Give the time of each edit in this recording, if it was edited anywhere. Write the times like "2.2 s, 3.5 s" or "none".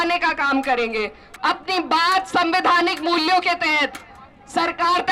1.2 s